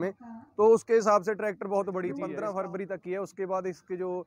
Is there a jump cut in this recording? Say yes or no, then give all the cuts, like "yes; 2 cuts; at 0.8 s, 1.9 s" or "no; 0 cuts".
yes; 1 cut; at 2.2 s